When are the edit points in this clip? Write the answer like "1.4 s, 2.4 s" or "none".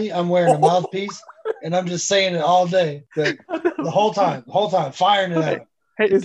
none

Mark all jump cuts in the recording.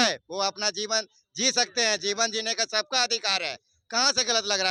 none

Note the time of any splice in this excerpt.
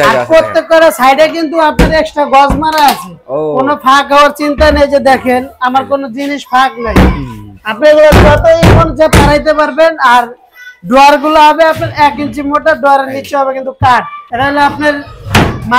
none

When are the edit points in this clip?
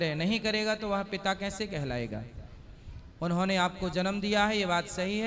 none

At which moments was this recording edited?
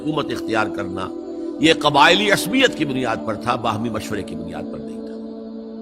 4.4 s

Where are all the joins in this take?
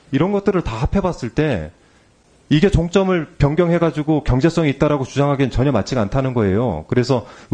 none

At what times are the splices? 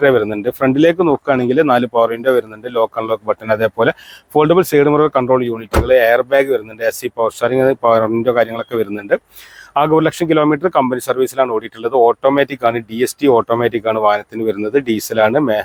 none

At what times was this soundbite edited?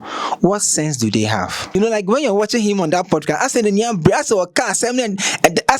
1.8 s

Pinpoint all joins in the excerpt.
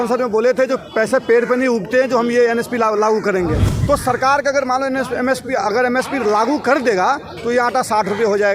3.7 s

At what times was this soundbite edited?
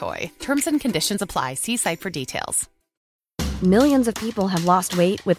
3.0 s

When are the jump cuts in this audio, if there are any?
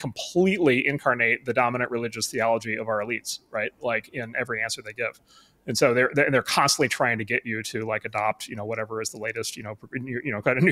none

